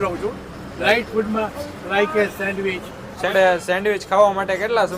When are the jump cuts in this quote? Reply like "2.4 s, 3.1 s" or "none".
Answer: 3.3 s